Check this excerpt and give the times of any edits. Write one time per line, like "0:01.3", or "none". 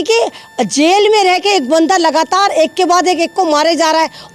none